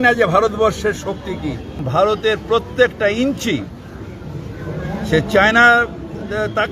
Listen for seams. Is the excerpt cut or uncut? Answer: cut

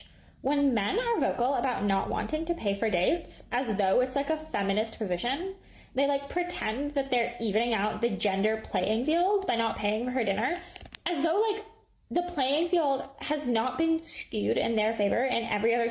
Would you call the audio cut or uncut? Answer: uncut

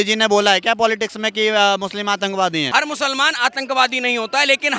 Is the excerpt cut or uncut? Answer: cut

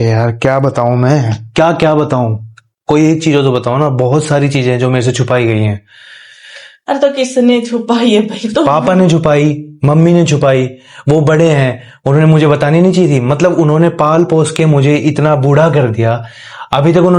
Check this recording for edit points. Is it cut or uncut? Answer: uncut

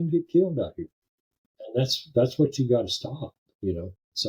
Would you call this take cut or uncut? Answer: cut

